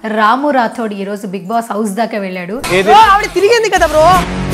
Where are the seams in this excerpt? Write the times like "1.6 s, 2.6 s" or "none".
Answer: 2.6 s